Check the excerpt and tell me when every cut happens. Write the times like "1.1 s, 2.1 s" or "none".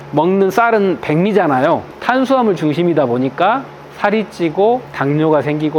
1.9 s